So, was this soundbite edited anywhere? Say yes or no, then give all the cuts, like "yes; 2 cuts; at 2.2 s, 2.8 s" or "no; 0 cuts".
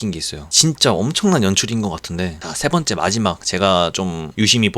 yes; 1 cut; at 2.4 s